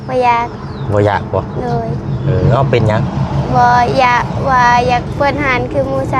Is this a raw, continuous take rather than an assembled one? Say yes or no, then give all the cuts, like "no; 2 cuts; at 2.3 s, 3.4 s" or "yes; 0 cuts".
yes; 0 cuts